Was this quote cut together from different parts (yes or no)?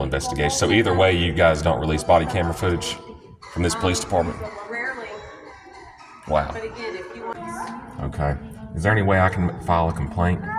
yes